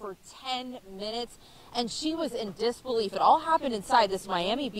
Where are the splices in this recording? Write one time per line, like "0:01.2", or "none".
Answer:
0:02.2

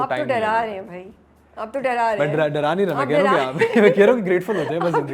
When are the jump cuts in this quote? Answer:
none

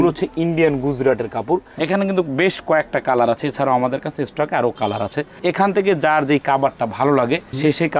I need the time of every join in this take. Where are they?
none

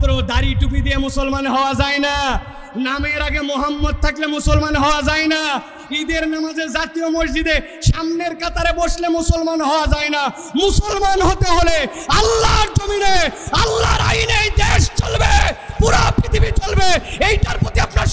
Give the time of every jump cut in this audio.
none

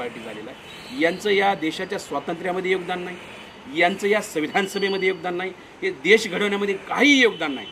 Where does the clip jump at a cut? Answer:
none

